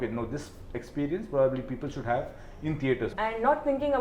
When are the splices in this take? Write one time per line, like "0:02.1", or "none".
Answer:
0:03.1